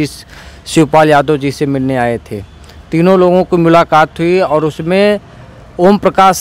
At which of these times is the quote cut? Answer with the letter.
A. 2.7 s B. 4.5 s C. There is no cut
C